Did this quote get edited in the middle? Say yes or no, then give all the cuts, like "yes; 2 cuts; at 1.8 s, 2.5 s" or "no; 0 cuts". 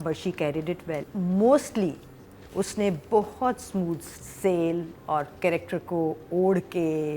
yes; 1 cut; at 1.1 s